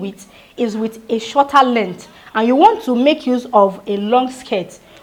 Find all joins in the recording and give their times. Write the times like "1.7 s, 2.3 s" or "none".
none